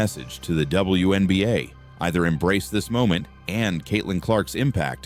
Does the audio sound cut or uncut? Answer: uncut